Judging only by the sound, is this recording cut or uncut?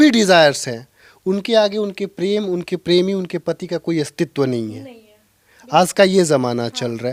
uncut